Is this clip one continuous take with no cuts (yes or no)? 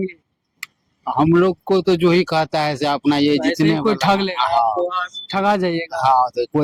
yes